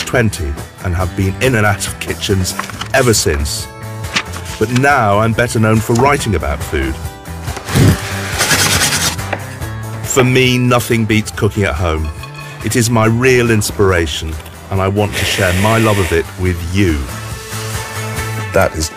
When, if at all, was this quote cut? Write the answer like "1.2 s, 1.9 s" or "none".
16.9 s